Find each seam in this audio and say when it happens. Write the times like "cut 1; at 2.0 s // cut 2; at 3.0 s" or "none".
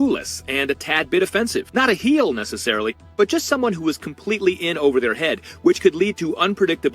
cut 1; at 1.7 s